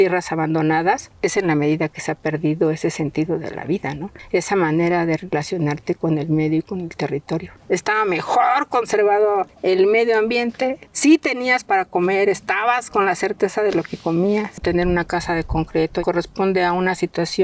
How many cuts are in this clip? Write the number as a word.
seven